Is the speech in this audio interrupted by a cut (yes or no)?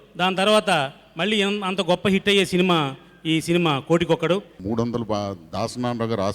yes